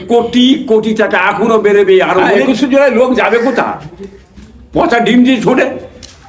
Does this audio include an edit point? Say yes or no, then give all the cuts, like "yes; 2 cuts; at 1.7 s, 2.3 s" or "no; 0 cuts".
yes; 1 cut; at 2.3 s